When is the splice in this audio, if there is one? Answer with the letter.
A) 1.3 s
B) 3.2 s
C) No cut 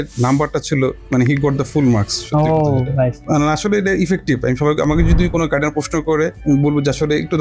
B